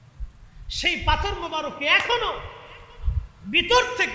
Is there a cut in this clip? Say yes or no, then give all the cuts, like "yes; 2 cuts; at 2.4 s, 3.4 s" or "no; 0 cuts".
no; 0 cuts